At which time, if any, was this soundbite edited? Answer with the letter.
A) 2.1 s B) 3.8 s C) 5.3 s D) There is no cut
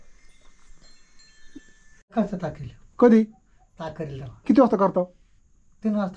A